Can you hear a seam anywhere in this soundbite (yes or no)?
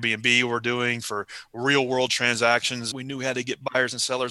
yes